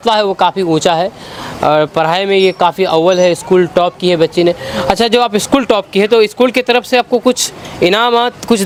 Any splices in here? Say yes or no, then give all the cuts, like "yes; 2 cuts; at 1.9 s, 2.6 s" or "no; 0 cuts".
no; 0 cuts